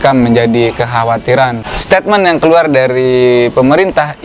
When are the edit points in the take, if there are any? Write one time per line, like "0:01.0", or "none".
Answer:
0:01.7